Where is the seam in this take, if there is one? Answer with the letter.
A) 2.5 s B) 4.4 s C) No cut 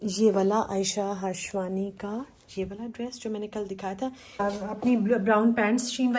B